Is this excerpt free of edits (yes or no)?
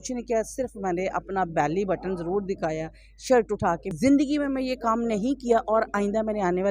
no